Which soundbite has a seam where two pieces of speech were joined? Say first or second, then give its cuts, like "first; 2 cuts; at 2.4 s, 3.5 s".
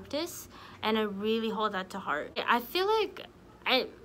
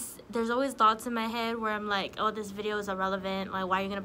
first; 1 cut; at 2.4 s